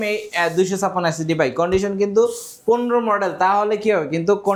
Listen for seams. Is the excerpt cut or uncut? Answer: uncut